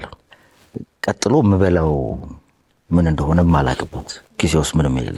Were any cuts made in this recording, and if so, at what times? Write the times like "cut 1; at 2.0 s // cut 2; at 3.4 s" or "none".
none